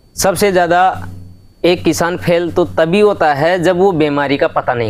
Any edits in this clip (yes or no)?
no